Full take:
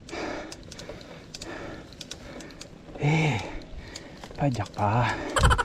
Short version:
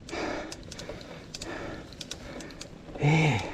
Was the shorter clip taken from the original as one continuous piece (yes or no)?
yes